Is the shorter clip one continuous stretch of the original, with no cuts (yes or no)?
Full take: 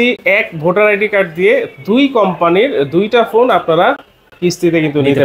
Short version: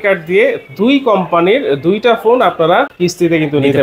no